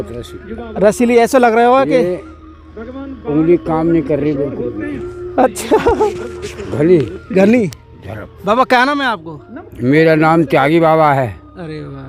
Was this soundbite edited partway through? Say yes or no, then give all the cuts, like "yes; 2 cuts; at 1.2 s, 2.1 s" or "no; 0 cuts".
no; 0 cuts